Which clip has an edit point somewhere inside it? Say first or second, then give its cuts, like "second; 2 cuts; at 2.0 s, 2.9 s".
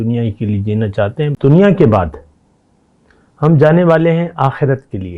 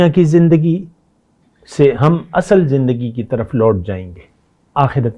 first; 1 cut; at 1.3 s